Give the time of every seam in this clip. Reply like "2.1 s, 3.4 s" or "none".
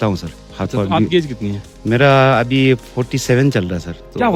none